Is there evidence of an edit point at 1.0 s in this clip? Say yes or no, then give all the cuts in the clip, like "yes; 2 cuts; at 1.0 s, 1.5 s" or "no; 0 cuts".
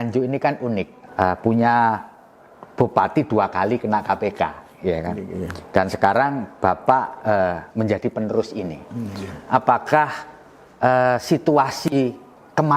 yes; 1 cut; at 1.0 s